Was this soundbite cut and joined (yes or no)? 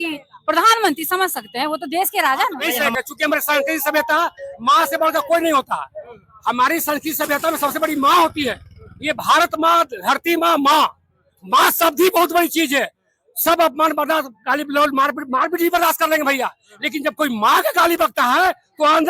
yes